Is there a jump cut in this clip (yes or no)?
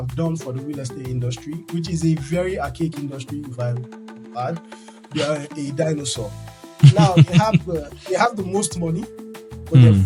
no